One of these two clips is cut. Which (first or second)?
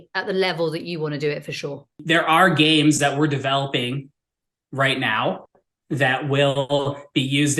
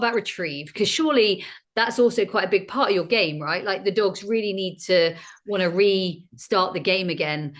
first